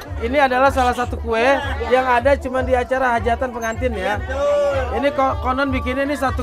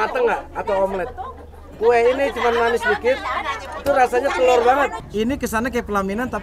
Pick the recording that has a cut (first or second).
second